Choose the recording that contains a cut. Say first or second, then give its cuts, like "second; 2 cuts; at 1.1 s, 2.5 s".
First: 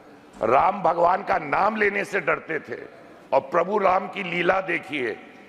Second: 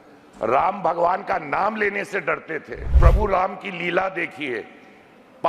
second; 1 cut; at 3.0 s